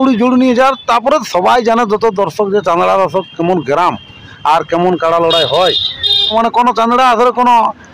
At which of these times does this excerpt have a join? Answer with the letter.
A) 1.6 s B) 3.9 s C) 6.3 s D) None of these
C